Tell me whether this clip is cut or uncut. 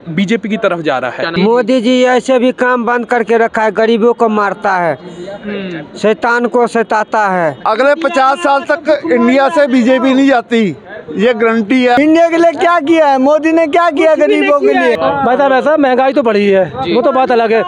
cut